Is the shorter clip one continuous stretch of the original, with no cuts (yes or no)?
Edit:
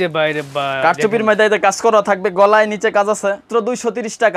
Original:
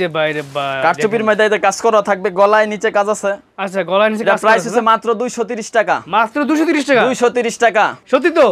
no